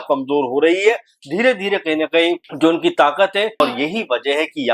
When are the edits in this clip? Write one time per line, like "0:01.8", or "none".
0:02.5
0:03.6